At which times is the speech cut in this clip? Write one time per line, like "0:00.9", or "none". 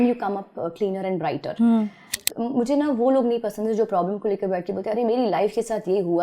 0:02.2